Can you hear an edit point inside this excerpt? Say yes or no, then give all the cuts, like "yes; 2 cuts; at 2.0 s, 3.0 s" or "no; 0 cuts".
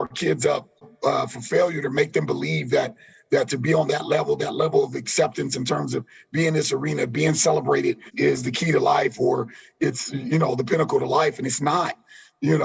yes; 2 cuts; at 0.9 s, 8.1 s